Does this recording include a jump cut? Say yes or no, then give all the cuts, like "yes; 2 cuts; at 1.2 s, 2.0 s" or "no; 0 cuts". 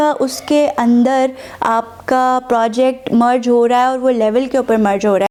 no; 0 cuts